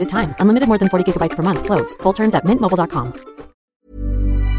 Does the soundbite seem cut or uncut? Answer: cut